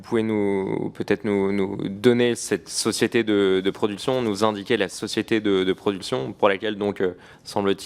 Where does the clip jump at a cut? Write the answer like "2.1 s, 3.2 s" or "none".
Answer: none